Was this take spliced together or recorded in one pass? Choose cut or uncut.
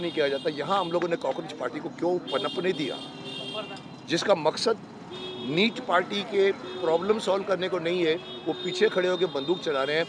uncut